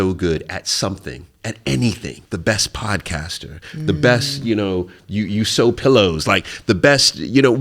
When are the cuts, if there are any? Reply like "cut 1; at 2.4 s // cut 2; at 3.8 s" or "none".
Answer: cut 1; at 2.1 s